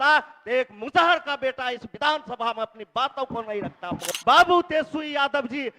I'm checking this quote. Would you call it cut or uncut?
cut